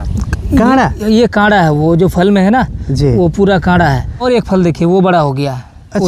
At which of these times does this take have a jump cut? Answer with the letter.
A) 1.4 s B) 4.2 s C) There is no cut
B